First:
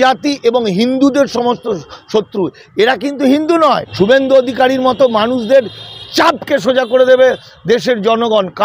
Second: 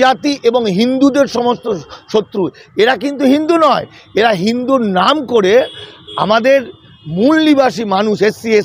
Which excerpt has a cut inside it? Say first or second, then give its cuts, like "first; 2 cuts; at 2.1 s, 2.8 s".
first; 1 cut; at 3.9 s